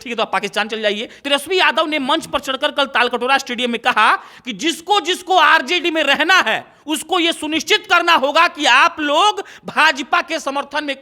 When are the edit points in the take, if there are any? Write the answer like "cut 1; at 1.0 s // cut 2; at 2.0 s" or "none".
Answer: cut 1; at 1.2 s